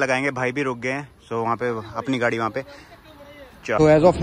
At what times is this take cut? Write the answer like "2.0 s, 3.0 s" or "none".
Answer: none